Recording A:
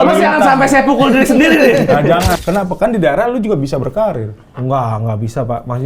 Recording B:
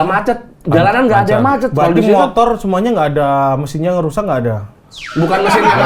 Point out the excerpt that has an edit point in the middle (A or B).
A